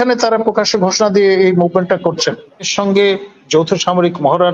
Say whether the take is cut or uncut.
cut